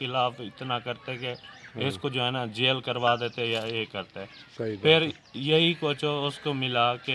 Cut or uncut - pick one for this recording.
uncut